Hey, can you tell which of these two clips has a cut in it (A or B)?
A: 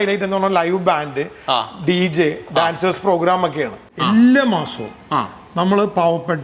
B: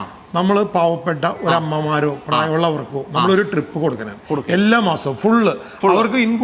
A